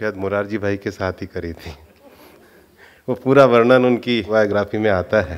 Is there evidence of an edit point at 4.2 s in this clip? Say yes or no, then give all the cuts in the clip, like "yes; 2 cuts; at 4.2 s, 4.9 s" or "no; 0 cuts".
yes; 1 cut; at 4.2 s